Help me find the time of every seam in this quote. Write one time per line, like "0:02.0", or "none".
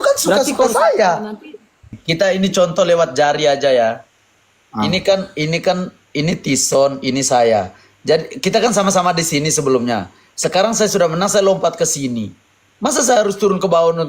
0:02.0